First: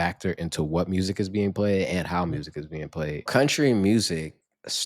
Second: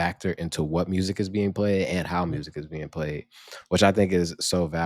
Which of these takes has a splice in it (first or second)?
first